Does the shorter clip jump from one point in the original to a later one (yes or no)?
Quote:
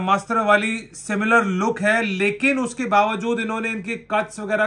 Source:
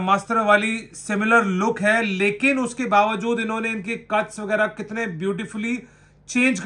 no